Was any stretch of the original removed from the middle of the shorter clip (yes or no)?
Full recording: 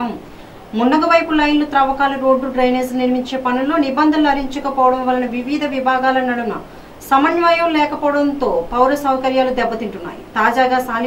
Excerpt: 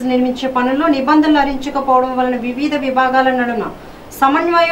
no